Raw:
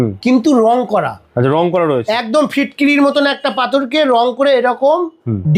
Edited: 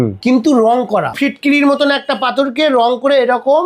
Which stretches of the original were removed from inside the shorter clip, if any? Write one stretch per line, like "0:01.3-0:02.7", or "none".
0:01.2-0:02.5